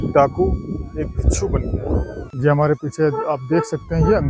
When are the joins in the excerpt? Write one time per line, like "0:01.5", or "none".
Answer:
0:02.3